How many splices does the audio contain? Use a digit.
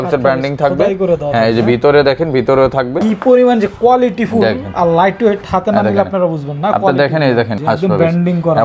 2